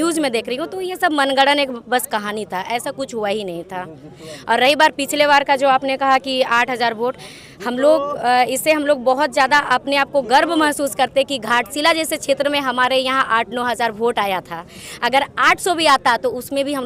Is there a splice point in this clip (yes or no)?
no